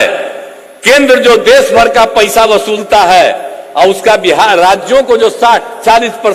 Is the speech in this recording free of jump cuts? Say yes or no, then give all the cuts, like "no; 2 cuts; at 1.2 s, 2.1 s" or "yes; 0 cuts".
yes; 0 cuts